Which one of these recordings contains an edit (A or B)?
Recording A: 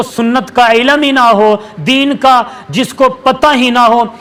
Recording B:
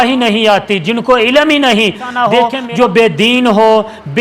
B